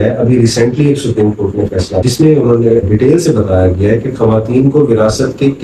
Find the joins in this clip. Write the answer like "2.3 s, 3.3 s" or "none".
2.0 s, 2.9 s